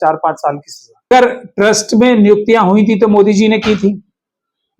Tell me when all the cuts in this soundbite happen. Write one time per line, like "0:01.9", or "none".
0:01.1